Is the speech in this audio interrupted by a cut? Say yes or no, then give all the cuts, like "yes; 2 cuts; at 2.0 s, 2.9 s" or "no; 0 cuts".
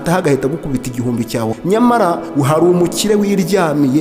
yes; 2 cuts; at 1.6 s, 2.2 s